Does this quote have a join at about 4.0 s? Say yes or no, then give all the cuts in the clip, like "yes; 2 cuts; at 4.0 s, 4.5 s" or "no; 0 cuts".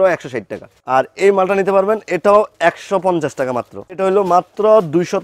yes; 1 cut; at 4.0 s